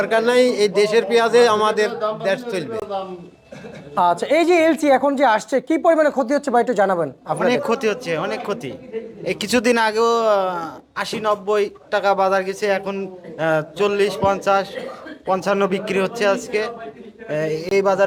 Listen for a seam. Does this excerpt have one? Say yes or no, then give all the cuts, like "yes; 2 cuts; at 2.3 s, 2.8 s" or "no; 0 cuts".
no; 0 cuts